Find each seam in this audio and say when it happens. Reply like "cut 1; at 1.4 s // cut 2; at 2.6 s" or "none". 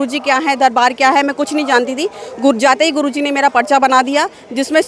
none

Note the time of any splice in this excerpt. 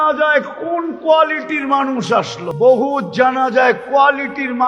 cut 1; at 2.4 s

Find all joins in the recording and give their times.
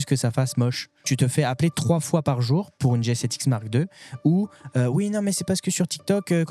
cut 1; at 1.1 s

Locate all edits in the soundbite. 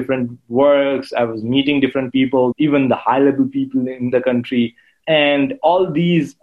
cut 1; at 2.5 s // cut 2; at 4.1 s // cut 3; at 4.9 s

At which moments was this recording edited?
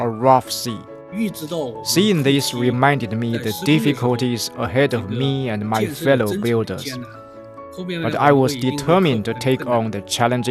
cut 1; at 1.1 s

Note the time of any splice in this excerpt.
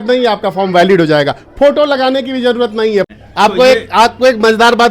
cut 1; at 3.1 s

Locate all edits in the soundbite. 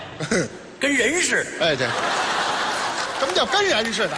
none

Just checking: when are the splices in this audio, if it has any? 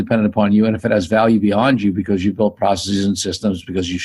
none

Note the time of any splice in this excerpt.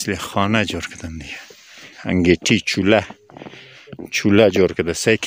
cut 1; at 1.9 s

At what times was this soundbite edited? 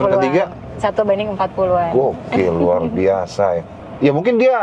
cut 1; at 3.7 s

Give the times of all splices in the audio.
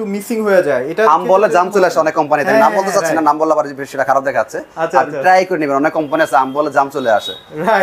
none

